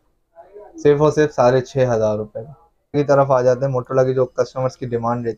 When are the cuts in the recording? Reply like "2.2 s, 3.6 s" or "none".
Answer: 2.9 s